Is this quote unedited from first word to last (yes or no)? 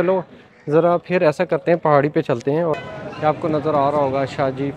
no